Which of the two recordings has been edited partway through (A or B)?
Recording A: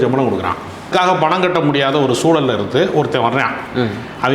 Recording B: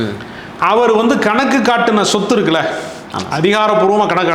A